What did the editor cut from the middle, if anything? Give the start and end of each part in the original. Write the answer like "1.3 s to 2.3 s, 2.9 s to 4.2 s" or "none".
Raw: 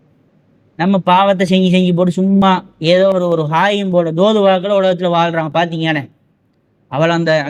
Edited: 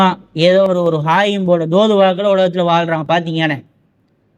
none